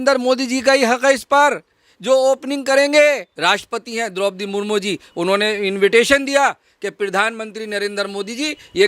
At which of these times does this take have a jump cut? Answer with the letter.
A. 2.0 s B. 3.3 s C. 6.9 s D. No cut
B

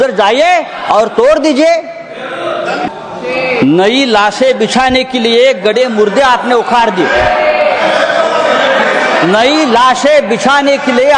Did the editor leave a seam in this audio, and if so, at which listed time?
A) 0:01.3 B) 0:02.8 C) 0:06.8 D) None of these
B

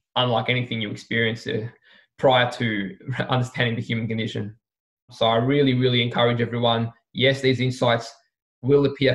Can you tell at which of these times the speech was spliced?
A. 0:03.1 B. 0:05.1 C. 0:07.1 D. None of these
B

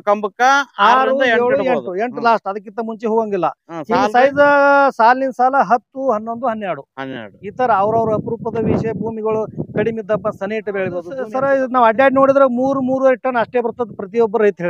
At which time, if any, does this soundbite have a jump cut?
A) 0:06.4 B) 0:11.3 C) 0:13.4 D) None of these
B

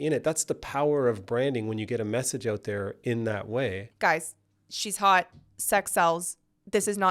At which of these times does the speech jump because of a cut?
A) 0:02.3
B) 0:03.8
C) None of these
B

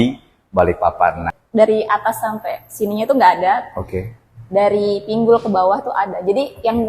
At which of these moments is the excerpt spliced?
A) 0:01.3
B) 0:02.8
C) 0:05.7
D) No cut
A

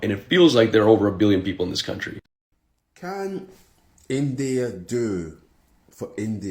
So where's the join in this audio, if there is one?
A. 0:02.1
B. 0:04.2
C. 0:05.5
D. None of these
A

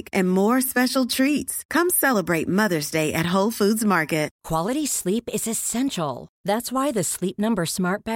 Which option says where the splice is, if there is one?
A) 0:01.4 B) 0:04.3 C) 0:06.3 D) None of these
B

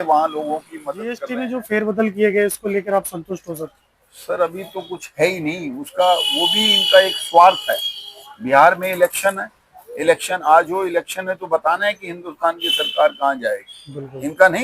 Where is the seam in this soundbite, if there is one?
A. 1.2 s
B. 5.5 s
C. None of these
A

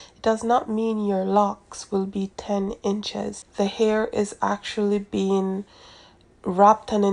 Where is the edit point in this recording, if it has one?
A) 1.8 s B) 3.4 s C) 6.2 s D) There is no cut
B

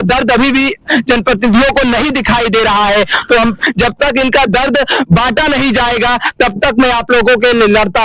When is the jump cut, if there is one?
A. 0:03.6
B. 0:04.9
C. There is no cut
A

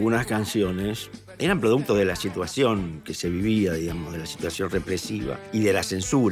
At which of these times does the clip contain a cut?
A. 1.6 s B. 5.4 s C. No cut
B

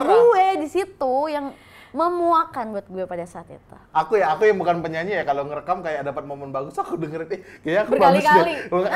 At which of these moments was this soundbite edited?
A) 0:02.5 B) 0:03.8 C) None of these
B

